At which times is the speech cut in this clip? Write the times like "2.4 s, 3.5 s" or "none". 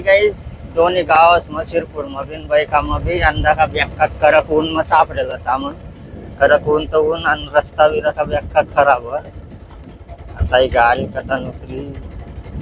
none